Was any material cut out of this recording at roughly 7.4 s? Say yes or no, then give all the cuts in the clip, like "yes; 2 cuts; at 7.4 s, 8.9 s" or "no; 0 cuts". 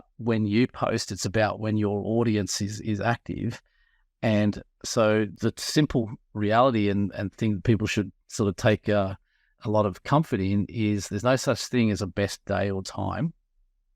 no; 2 cuts; at 5.3 s, 9.5 s